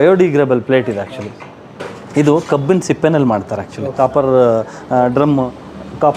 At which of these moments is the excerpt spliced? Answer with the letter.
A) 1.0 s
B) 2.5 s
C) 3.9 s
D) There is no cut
C